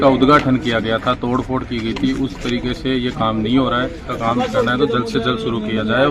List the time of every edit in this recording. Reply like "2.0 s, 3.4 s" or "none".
4.1 s